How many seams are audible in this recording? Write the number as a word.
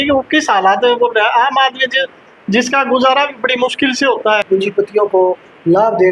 one